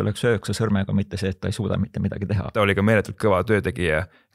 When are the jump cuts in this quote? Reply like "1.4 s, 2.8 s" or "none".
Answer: 2.5 s